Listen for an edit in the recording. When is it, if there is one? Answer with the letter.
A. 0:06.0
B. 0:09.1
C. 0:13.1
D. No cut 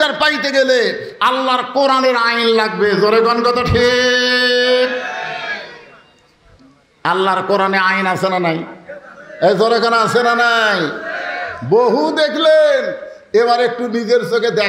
D